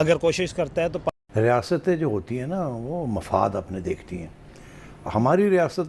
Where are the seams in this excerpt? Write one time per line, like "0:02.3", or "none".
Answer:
0:01.1